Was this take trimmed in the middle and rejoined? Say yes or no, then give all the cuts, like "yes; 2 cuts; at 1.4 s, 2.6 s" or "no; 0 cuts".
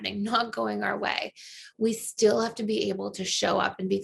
no; 0 cuts